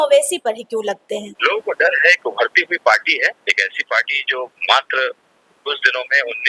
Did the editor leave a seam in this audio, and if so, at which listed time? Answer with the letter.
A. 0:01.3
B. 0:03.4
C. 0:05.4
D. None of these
A